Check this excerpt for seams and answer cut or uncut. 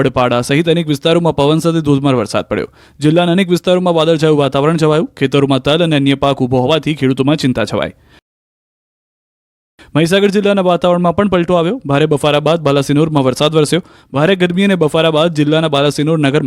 cut